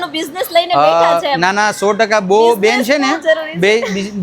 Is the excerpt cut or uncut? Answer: uncut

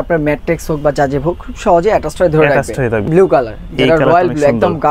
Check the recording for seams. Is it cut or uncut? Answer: cut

